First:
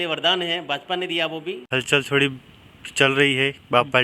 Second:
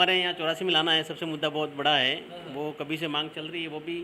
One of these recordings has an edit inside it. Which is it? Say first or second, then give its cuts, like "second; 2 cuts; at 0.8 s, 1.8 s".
first; 1 cut; at 1.6 s